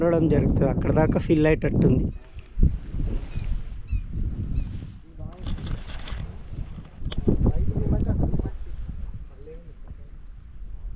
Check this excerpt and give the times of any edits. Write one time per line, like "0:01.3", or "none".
none